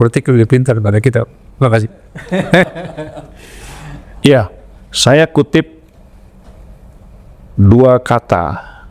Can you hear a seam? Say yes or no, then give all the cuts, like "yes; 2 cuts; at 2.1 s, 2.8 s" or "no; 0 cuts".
yes; 1 cut; at 4.1 s